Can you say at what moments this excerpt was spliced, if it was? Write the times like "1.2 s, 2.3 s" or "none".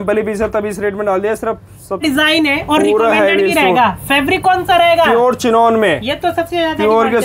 2.0 s

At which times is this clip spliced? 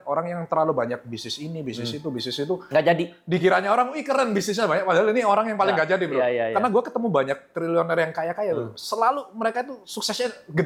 none

